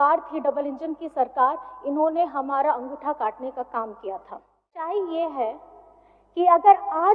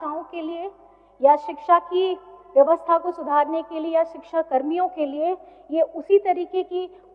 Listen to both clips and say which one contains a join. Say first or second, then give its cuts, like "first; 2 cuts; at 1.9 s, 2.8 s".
first; 1 cut; at 4.8 s